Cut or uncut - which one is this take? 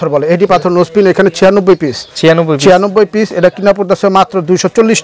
uncut